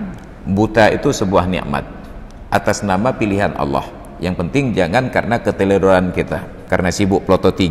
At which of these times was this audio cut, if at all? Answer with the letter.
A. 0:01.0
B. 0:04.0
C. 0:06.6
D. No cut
C